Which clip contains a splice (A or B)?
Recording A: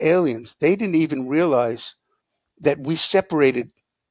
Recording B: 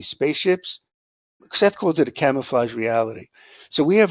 B